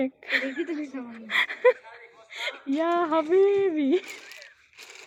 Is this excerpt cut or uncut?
uncut